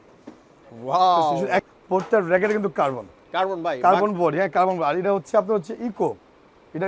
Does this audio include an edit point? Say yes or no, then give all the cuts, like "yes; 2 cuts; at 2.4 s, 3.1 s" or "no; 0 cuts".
yes; 1 cut; at 1.7 s